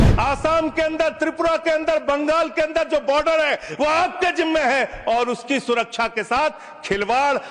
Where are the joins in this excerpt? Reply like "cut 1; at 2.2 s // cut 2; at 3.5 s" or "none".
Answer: none